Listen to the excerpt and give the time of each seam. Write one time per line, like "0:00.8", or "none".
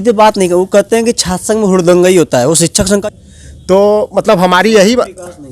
0:03.0